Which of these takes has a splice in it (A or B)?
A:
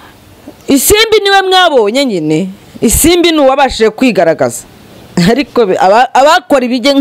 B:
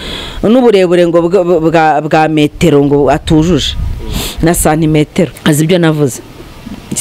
B